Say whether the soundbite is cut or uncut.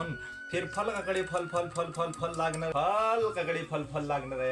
cut